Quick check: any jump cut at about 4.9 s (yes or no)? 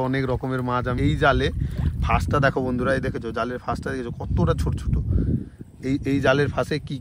no